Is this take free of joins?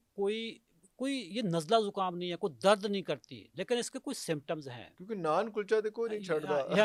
yes; 0 cuts

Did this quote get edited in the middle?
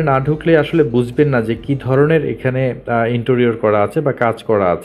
no; 0 cuts

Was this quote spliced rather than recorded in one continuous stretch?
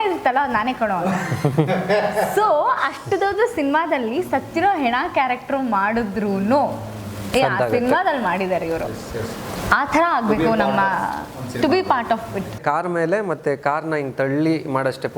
yes; 1 cut; at 12.6 s

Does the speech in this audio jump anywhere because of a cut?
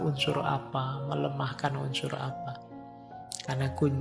no; 0 cuts

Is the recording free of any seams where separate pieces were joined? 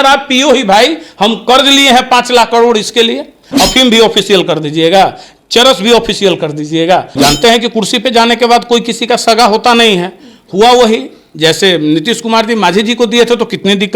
no; 2 cuts; at 3.4 s, 7.2 s

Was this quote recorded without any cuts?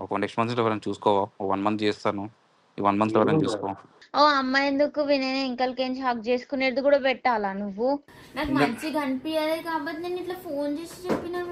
no; 2 cuts; at 3.9 s, 8.0 s

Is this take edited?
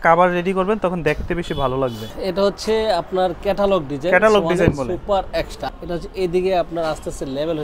yes; 2 cuts; at 2.2 s, 5.6 s

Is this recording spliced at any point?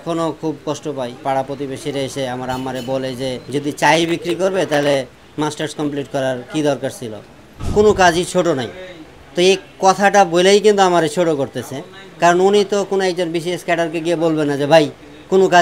yes; 3 cuts; at 1.2 s, 3.4 s, 7.6 s

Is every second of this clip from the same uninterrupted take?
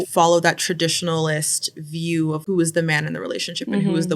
no; 1 cut; at 2.4 s

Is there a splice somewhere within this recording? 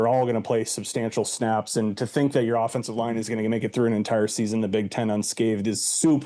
no; 0 cuts

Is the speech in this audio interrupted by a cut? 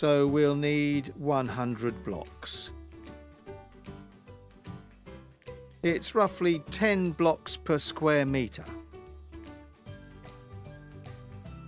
no; 0 cuts

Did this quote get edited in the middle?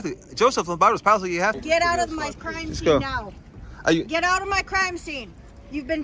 yes; 1 cut; at 1.6 s

